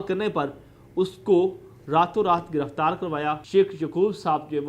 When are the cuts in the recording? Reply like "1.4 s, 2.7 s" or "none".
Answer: 3.4 s